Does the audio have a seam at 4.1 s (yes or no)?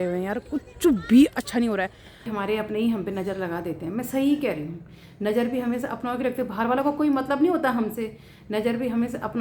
no